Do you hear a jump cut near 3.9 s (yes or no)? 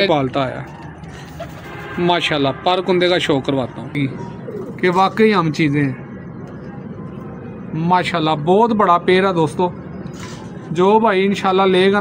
yes